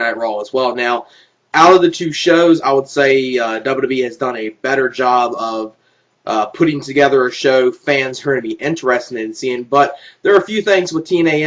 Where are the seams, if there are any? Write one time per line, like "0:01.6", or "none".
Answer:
0:05.8